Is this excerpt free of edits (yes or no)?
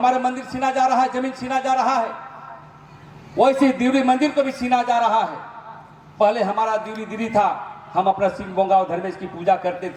yes